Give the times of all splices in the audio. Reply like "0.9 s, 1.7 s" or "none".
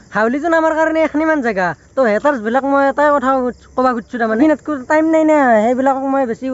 4.4 s